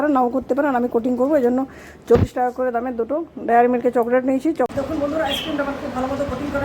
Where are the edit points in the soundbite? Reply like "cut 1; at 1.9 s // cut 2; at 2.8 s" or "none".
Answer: cut 1; at 4.7 s